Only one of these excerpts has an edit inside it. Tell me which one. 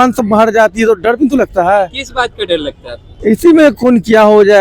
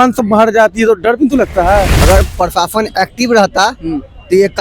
second; 1 cut; at 1.9 s

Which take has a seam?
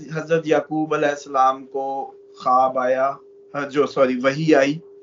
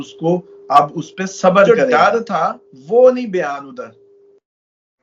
second; 1 cut; at 1.7 s

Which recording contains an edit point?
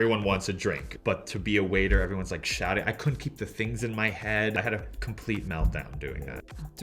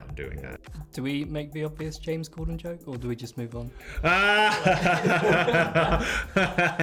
first; 2 cuts; at 0.9 s, 4.6 s

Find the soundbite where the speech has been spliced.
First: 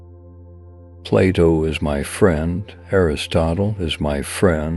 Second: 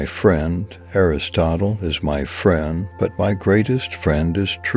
first; 1 cut; at 1.1 s

